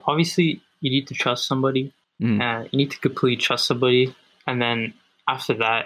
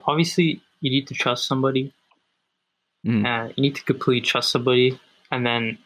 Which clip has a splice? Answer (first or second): first